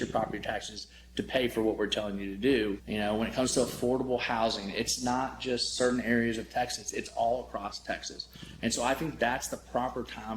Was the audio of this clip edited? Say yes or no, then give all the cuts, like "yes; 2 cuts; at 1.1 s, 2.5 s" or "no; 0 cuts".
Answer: yes; 1 cut; at 2.8 s